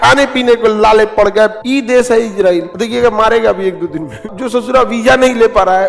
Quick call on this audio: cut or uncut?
cut